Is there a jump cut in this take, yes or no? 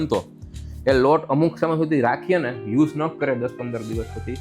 no